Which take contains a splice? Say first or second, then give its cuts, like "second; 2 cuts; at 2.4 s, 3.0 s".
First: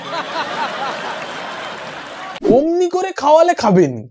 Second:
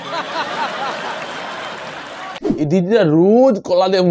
first; 1 cut; at 2.4 s